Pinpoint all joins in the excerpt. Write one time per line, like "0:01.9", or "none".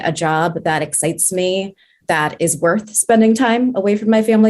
0:02.0